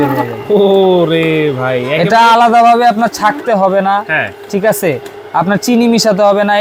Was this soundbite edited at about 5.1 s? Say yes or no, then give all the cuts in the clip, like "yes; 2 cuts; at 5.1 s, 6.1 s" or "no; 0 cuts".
no; 0 cuts